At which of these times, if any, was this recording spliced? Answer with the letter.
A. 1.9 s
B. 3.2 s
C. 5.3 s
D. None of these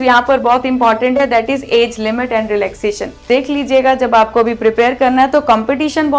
B